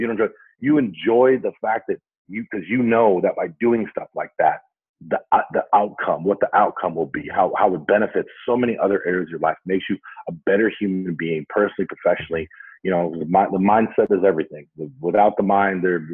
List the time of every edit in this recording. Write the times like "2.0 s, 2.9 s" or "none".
none